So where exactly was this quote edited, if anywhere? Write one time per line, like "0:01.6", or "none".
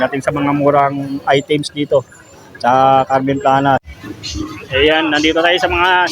0:03.9